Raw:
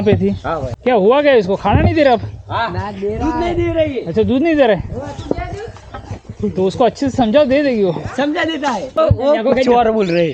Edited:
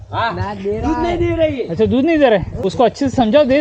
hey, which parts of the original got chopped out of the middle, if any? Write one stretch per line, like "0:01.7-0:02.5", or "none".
0:05.0-0:06.7